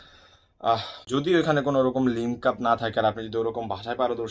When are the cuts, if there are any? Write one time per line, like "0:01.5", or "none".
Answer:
0:00.9